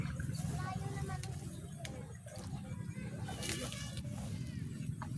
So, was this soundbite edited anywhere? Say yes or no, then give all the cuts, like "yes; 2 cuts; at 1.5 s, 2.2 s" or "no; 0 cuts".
no; 0 cuts